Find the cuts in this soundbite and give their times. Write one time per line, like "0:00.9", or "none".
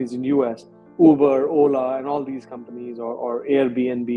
none

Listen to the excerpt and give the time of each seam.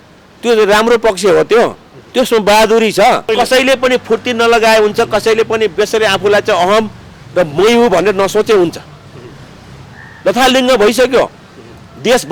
0:03.3

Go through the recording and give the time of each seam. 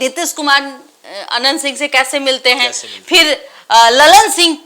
none

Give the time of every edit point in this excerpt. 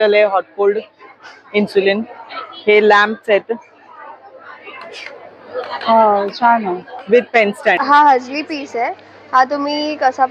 0:07.8

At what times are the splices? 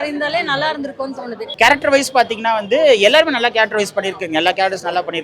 0:01.4

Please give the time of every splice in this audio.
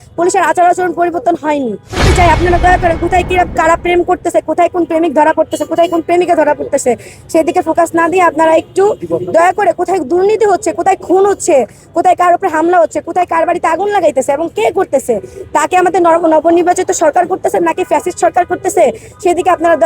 0:01.9

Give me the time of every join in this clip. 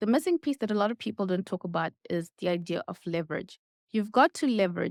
none

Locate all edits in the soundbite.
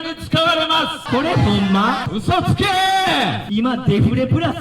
0:01.0
0:02.1
0:03.4

